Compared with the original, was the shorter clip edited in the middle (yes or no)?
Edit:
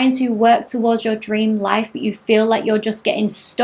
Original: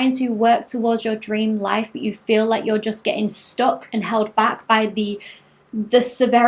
no